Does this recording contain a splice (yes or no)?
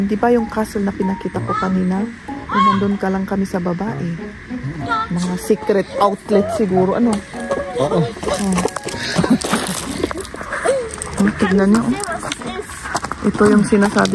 no